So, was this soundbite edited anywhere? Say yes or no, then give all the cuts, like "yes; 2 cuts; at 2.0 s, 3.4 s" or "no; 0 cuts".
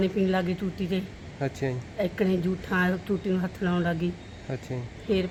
no; 0 cuts